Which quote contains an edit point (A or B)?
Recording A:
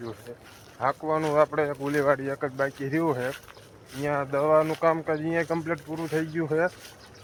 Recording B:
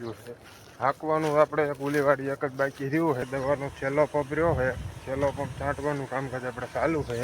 B